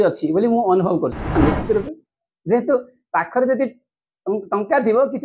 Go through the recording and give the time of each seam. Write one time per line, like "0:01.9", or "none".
0:01.4